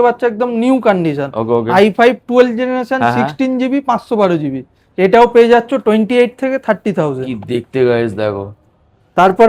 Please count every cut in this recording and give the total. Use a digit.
0